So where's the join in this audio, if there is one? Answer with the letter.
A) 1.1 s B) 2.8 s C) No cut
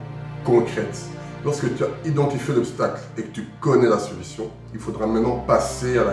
C